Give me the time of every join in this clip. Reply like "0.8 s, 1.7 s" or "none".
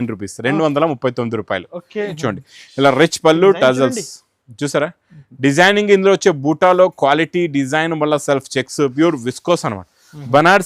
2.2 s